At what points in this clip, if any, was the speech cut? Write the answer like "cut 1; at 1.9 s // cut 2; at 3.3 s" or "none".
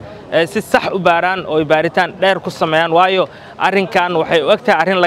none